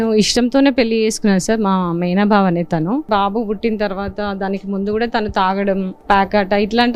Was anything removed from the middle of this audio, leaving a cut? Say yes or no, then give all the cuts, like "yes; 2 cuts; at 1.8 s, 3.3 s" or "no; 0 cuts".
yes; 2 cuts; at 3.1 s, 5.9 s